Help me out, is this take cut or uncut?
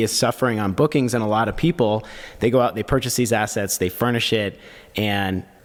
uncut